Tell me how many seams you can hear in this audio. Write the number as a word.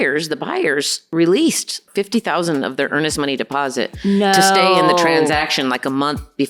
two